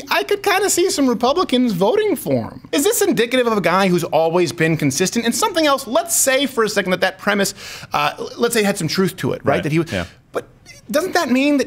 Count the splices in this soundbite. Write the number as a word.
one